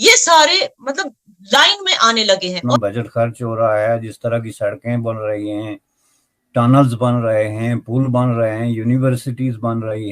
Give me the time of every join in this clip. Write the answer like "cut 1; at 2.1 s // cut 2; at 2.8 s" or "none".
cut 1; at 2.6 s